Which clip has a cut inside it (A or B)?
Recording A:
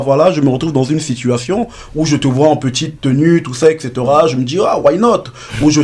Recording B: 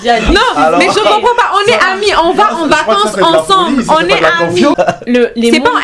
B